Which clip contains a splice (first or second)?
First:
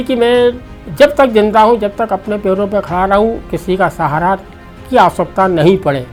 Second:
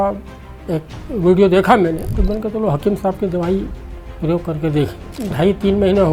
second